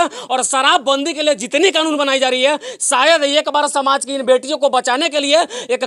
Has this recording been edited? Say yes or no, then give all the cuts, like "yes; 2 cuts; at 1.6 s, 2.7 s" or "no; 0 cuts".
no; 0 cuts